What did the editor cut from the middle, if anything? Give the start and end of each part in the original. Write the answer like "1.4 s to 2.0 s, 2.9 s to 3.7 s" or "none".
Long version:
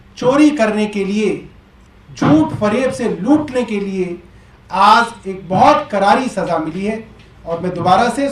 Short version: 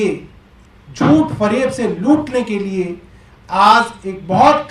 none